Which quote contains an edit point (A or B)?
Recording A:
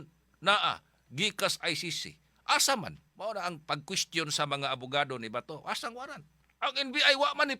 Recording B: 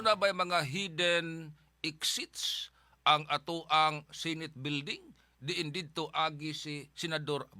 A